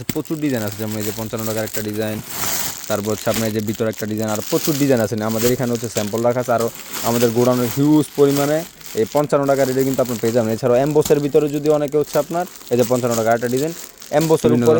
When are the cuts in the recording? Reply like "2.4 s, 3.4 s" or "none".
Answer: none